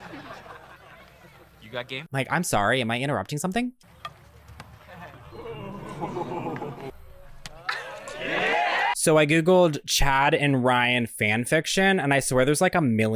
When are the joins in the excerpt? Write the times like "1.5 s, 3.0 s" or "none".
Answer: none